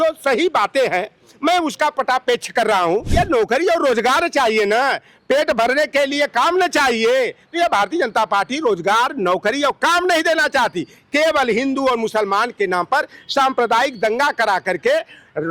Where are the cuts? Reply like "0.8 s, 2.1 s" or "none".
3.1 s